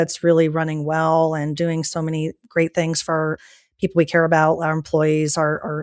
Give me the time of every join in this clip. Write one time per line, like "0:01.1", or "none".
0:03.4